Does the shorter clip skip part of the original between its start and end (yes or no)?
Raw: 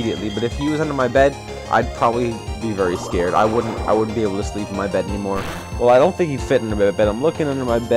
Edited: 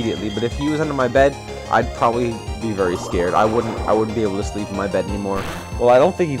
no